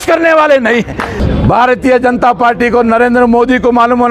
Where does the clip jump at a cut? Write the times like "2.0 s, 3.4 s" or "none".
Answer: 1.2 s